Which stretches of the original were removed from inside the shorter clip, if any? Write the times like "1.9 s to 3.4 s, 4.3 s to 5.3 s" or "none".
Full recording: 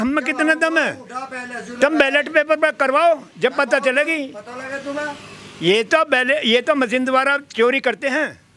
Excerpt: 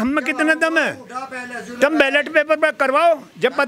none